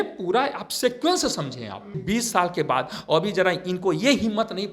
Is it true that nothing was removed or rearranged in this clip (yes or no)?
no